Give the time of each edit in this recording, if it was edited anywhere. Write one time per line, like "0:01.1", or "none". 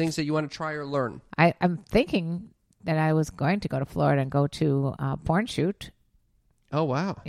0:01.2